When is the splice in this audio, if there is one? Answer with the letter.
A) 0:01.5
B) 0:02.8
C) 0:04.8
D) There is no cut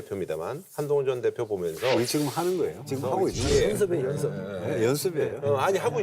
B